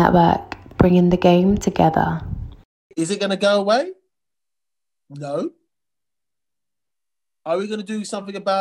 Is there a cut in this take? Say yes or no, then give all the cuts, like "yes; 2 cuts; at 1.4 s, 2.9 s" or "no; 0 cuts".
yes; 1 cut; at 2.9 s